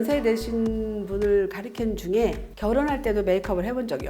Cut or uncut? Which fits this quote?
cut